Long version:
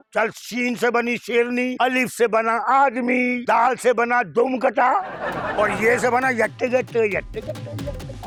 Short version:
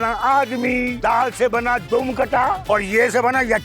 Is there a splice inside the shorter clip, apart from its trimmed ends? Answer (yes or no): yes